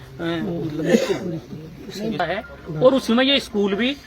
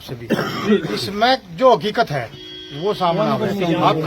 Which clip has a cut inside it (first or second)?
first